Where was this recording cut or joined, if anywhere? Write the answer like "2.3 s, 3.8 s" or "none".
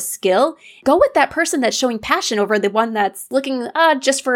0.8 s, 3.2 s